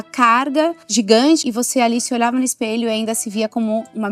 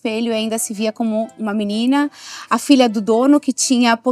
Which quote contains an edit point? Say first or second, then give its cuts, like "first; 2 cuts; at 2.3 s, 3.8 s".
first; 2 cuts; at 0.8 s, 1.4 s